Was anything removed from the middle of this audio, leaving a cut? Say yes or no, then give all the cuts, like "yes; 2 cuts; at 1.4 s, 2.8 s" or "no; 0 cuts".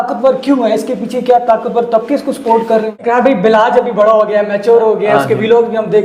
yes; 1 cut; at 3.0 s